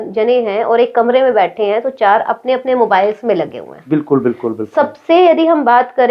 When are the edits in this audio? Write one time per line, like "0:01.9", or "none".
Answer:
none